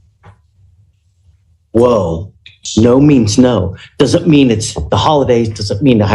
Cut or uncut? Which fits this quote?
cut